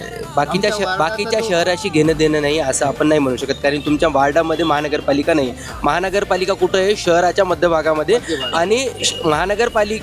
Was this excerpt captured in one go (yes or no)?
yes